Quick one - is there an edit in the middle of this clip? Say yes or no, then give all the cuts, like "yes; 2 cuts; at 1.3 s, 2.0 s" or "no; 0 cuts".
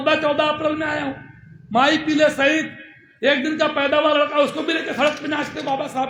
no; 0 cuts